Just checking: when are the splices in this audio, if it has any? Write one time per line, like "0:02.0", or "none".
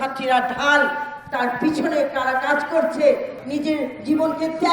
0:03.3